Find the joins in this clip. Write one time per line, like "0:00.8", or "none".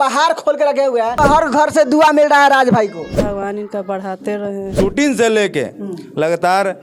0:01.2
0:03.2
0:04.7